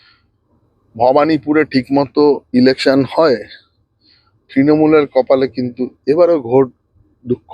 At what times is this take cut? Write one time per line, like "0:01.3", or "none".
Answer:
none